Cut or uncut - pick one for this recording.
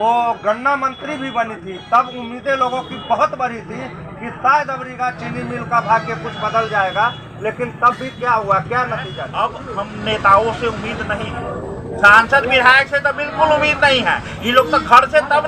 cut